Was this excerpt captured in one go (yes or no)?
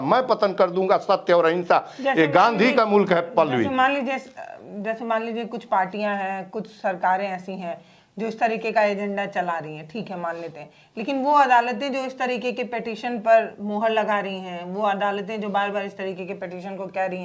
yes